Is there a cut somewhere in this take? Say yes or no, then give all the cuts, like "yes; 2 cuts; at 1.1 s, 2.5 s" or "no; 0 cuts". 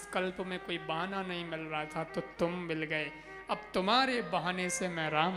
no; 0 cuts